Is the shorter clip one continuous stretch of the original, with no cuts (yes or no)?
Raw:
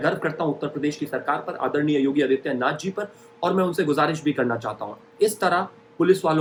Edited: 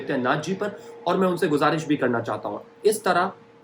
yes